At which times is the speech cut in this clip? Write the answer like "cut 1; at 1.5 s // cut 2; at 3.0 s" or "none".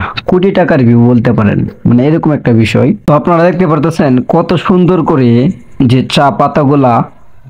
cut 1; at 3.0 s